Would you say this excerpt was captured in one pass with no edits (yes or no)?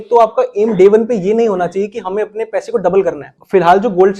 no